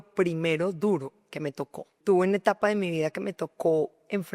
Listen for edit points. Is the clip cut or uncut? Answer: cut